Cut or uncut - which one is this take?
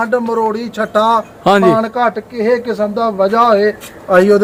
uncut